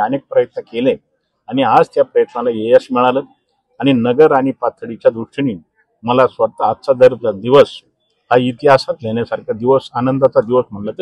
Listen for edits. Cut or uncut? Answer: uncut